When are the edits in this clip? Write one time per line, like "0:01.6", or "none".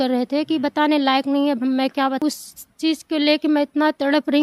0:02.2

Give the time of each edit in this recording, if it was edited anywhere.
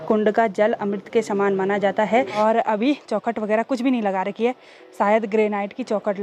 0:02.3

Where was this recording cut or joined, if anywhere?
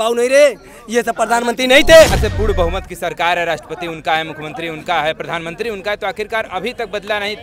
0:02.3

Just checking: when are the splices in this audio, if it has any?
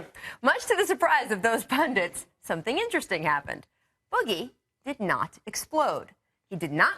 0:02.3

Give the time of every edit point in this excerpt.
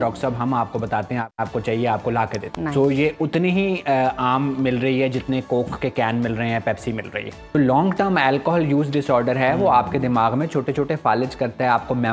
0:01.3
0:02.4
0:07.6

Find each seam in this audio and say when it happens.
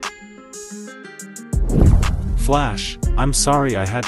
0:02.2

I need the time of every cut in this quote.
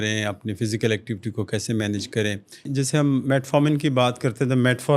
0:02.7

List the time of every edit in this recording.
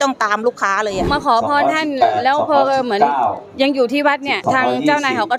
0:01.1

